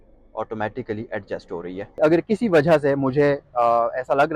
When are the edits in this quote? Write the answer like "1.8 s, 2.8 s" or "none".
2.0 s